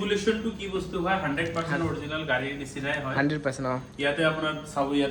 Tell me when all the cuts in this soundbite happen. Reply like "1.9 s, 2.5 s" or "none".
none